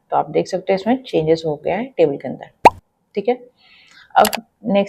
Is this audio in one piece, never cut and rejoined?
yes; 0 cuts

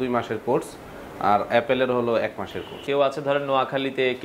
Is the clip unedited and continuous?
no; 1 cut; at 2.8 s

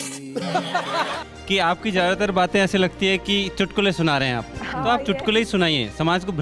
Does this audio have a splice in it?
yes; 1 cut; at 1.2 s

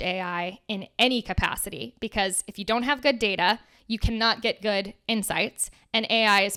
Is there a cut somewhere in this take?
no; 0 cuts

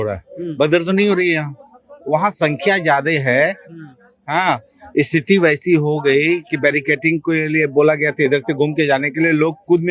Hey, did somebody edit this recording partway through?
no; 0 cuts

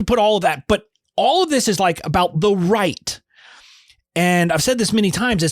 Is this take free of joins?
yes; 0 cuts

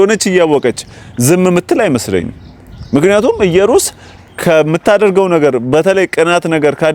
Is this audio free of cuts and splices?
yes; 0 cuts

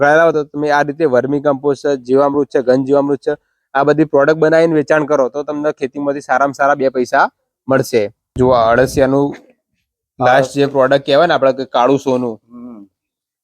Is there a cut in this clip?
yes; 1 cut; at 8.3 s

